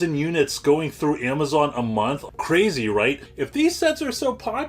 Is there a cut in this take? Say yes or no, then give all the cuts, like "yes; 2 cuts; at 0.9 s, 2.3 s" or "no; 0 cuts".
yes; 2 cuts; at 2.2 s, 3.3 s